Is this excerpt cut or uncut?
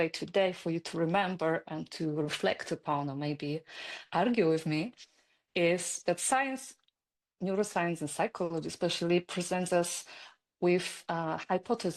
uncut